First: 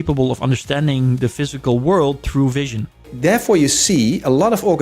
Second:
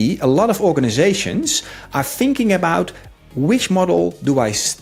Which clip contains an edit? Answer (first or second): first